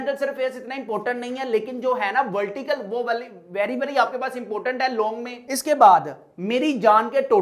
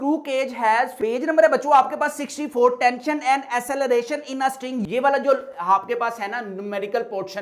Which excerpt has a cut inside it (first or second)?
second